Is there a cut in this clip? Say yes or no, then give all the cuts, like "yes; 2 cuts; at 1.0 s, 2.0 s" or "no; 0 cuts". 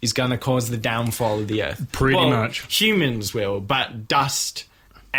no; 0 cuts